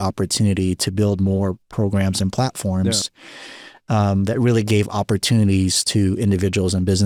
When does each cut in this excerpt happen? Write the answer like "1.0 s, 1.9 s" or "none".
none